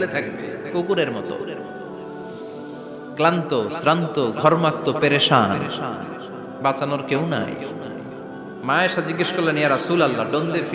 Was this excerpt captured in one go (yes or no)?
no